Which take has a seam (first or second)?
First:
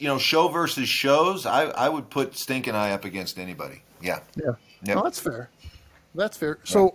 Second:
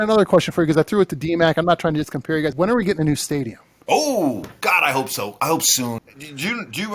second